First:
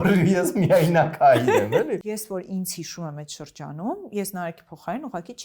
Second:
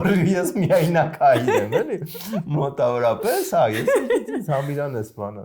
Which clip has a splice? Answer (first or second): first